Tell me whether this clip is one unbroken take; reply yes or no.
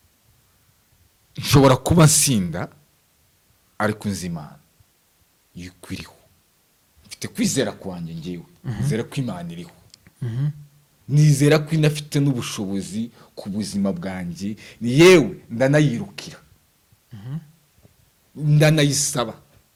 yes